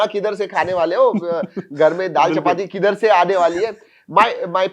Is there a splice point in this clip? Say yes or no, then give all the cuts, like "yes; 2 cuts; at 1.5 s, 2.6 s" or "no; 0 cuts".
no; 0 cuts